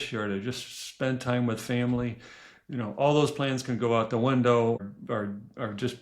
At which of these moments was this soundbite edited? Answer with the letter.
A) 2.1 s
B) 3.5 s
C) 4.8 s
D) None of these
C